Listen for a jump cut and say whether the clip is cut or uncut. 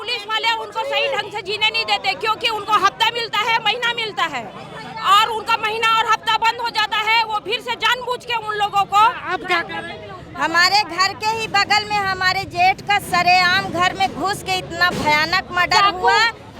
uncut